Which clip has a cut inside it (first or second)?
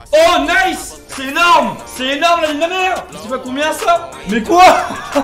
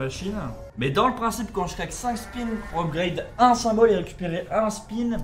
first